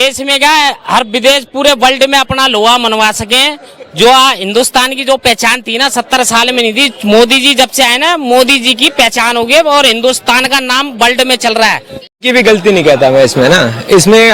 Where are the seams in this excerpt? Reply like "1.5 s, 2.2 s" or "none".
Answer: 12.2 s